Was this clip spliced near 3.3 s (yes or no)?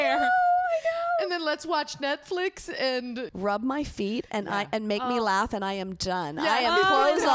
yes